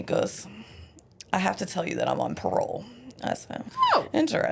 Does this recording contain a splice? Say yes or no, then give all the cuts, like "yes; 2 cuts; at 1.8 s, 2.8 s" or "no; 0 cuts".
yes; 1 cut; at 3.6 s